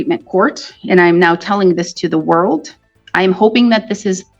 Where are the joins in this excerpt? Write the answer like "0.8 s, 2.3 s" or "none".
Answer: none